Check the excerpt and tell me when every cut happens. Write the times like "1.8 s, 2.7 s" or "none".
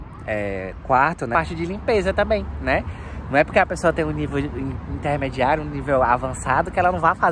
1.3 s